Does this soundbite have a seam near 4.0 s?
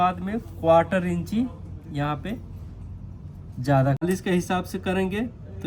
yes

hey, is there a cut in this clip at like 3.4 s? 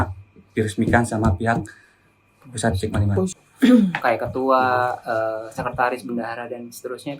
yes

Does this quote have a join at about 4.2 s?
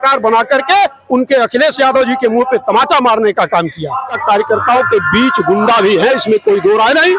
yes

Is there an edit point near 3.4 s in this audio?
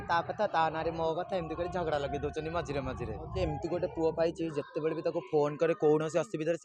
yes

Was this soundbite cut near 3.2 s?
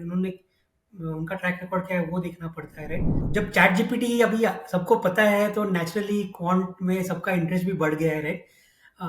yes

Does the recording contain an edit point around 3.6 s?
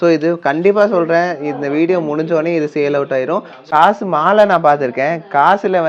yes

